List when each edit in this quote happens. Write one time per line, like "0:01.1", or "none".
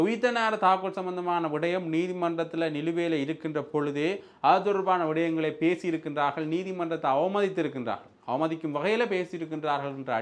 none